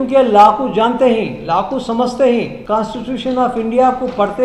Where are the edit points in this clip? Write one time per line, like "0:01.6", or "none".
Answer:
0:02.6